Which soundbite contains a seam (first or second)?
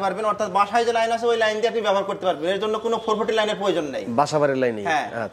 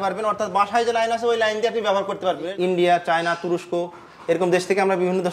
second